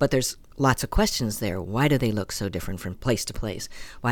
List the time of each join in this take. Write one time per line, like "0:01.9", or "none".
0:03.0